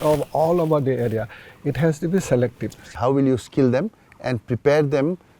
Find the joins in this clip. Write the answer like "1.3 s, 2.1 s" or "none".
2.9 s